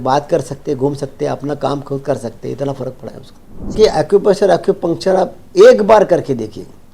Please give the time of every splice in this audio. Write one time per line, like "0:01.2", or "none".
0:03.7